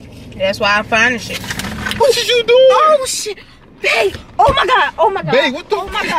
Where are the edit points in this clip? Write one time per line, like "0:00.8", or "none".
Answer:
0:01.8